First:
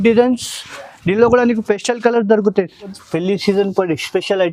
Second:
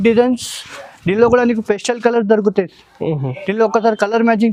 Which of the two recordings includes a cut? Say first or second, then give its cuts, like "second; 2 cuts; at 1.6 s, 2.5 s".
first; 1 cut; at 3.0 s